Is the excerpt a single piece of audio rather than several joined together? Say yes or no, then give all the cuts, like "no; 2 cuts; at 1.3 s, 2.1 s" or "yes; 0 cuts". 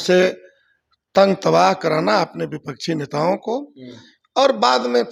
yes; 0 cuts